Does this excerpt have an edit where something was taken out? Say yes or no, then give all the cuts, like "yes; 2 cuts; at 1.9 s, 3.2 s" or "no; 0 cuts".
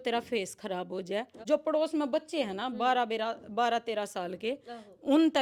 yes; 1 cut; at 1.3 s